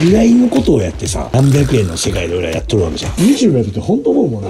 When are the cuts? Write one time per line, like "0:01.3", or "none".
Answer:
0:01.3
0:03.1

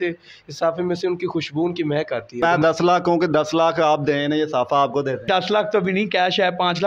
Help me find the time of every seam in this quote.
0:02.4
0:05.3

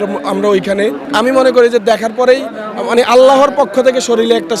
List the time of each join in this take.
0:01.0

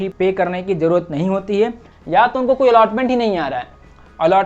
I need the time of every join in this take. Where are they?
0:01.9

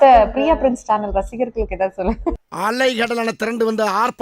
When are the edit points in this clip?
none

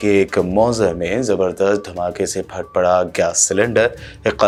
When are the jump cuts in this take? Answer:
none

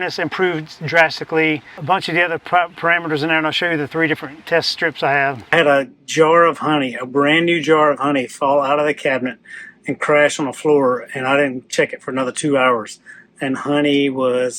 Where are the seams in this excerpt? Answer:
0:01.7
0:05.5

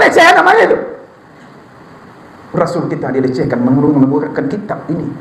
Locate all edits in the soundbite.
none

